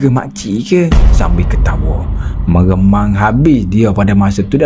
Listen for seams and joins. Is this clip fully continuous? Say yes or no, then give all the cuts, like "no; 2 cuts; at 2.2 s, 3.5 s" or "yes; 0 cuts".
yes; 0 cuts